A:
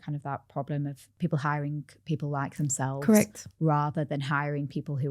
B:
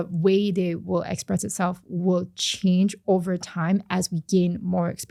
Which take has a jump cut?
A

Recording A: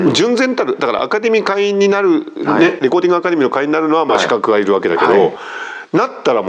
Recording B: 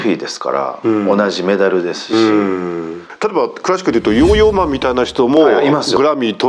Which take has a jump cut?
B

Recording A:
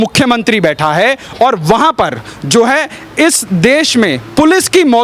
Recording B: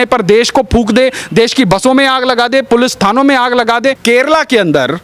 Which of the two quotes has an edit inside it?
B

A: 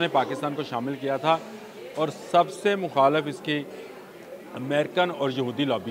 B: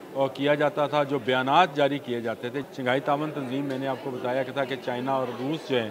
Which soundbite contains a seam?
B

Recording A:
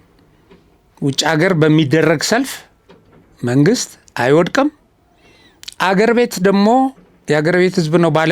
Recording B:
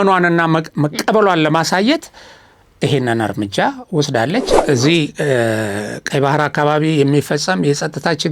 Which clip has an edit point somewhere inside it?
B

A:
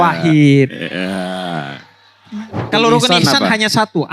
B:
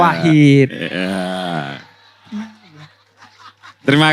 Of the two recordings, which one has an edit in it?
A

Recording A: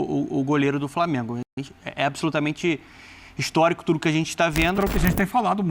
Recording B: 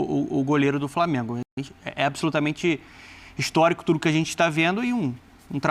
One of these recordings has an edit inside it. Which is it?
A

